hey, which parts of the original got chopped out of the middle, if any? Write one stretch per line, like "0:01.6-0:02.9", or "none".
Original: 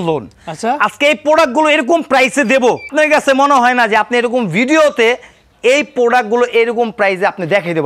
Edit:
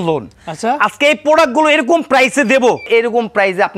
0:02.9-0:06.5